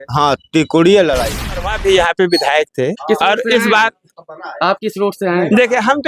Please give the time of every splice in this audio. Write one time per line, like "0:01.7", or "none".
0:01.7